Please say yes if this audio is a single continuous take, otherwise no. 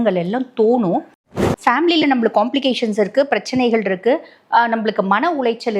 no